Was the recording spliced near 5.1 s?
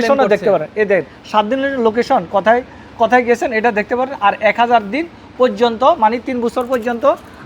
no; 0 cuts

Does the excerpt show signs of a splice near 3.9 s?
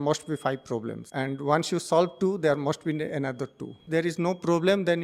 yes; 2 cuts; at 1.0 s, 3.9 s

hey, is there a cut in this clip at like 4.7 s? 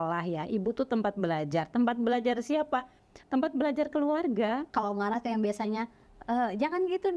yes; 1 cut; at 4.7 s

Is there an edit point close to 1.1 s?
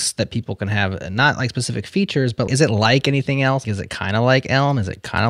no; 2 cuts; at 2.5 s, 3.6 s

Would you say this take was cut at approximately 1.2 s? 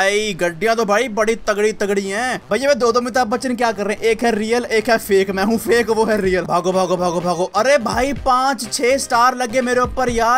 no; 2 cuts; at 2.4 s, 6.5 s

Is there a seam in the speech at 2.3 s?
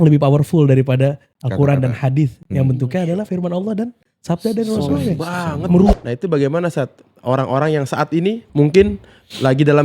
no; 2 cuts; at 5.9 s, 8.4 s

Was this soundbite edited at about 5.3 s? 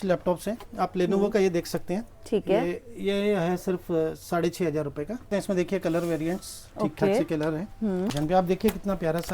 yes; 2 cuts; at 5.3 s, 8.1 s

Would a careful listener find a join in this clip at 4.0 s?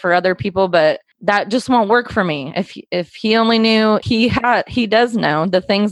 yes; 1 cut; at 4.0 s

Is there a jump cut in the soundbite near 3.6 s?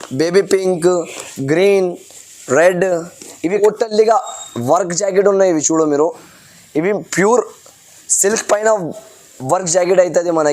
yes; 1 cut; at 3.6 s

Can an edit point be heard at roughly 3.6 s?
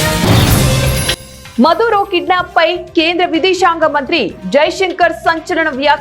no; 1 cut; at 1.1 s

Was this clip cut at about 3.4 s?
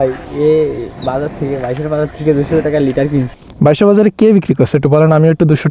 yes; 1 cut; at 3.4 s

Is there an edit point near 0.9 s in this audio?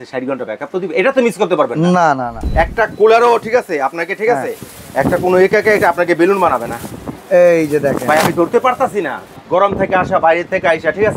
no; 2 cuts; at 2.4 s, 9.3 s

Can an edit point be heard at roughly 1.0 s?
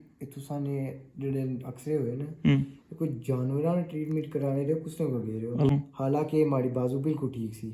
no; 1 cut; at 5.7 s

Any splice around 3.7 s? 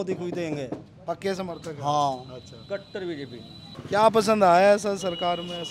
yes; 1 cut; at 3.7 s

